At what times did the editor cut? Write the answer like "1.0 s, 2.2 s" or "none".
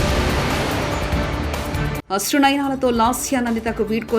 2.0 s

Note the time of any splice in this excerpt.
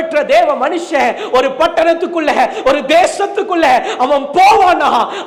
none

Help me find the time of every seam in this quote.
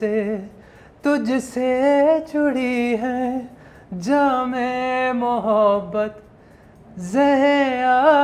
none

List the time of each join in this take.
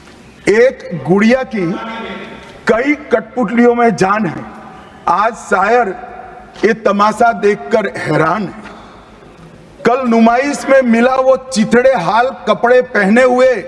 none

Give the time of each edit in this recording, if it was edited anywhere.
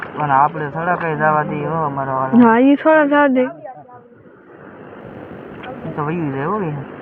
none

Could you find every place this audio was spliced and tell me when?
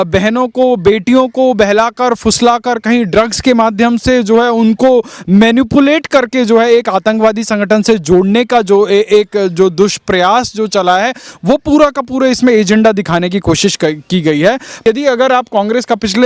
14.8 s

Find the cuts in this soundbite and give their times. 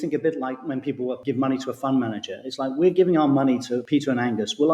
1.2 s, 3.8 s

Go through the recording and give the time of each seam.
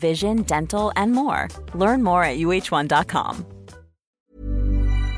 4.1 s

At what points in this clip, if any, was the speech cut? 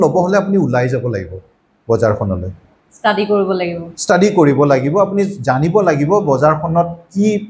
none

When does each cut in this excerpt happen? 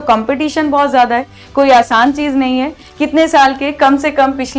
2.8 s

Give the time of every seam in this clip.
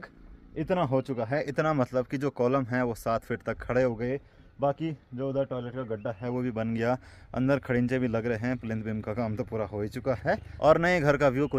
none

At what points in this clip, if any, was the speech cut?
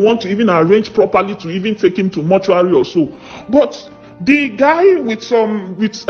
none

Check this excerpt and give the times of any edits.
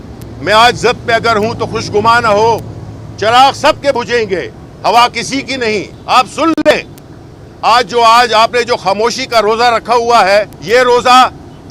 5.9 s, 10.6 s

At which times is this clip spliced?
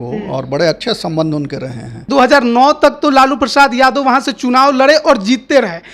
2.0 s

